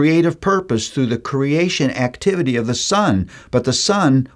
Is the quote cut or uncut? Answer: uncut